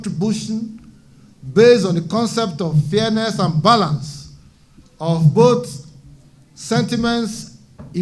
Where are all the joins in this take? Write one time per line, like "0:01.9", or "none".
none